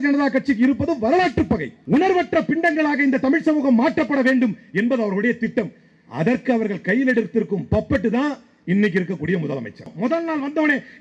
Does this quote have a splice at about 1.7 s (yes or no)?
yes